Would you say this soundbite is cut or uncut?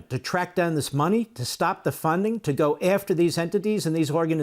uncut